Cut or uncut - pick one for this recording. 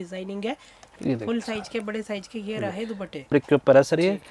cut